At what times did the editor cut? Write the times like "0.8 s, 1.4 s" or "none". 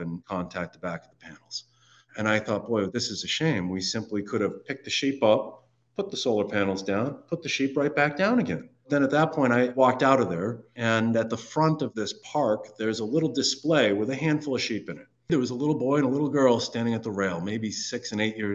8.8 s, 10.6 s, 15.3 s